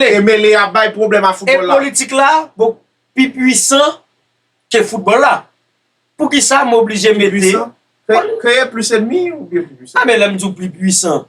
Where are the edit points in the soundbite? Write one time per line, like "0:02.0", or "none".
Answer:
none